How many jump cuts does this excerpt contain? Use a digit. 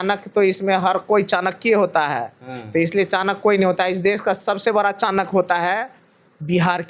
0